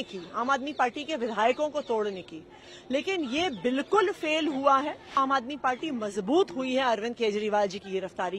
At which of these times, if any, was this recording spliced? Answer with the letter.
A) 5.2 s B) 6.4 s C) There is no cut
A